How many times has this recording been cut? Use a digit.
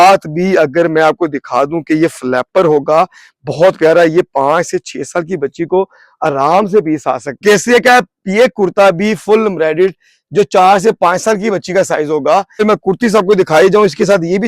2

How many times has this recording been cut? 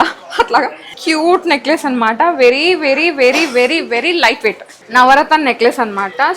2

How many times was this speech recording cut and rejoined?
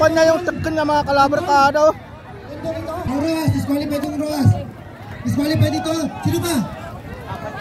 1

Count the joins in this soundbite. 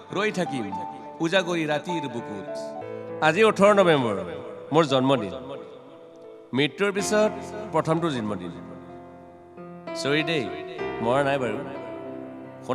1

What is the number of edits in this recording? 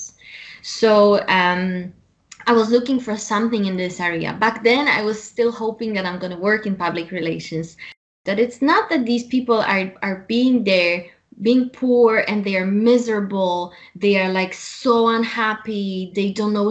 1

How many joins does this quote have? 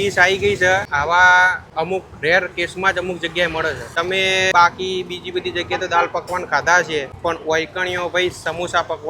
4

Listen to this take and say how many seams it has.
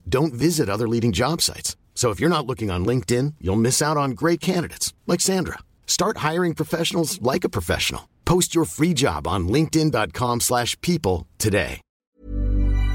1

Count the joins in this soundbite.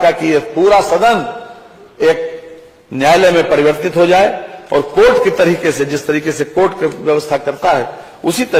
0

